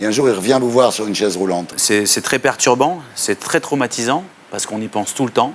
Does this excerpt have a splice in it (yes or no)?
yes